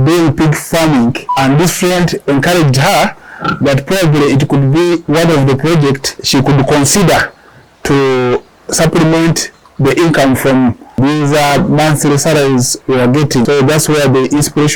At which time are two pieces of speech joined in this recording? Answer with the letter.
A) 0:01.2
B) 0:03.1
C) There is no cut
A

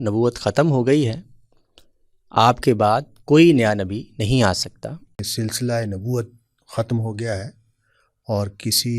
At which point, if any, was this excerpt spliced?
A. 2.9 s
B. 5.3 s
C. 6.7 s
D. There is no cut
B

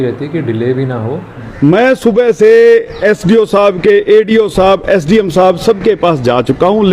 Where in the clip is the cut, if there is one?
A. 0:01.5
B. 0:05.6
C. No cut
A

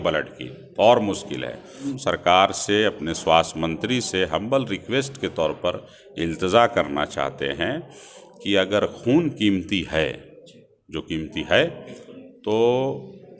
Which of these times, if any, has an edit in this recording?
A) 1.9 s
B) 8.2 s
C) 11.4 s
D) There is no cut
A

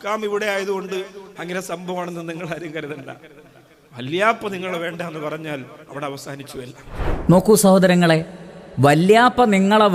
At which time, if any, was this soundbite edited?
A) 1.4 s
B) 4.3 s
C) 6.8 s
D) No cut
D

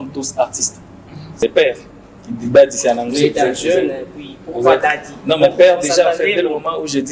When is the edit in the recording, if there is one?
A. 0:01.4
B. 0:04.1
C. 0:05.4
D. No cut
A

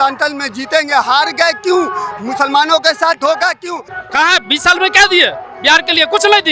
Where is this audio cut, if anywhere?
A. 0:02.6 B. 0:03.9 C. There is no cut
B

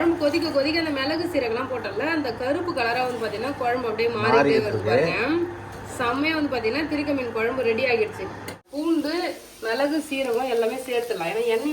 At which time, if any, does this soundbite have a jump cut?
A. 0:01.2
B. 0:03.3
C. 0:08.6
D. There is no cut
C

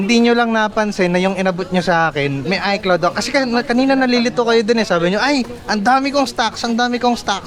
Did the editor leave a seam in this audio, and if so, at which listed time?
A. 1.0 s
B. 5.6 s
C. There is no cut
C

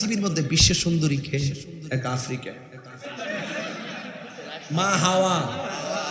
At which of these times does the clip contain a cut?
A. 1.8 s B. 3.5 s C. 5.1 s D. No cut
A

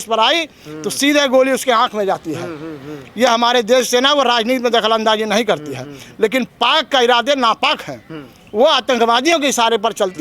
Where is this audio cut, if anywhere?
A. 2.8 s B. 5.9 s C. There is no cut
C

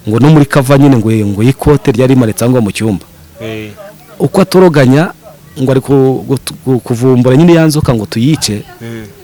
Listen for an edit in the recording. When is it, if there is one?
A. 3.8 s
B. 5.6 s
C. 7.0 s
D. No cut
D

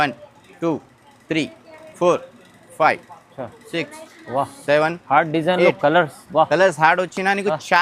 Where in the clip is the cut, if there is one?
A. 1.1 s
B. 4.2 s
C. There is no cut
C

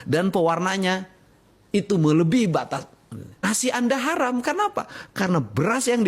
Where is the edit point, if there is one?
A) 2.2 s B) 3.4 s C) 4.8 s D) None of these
B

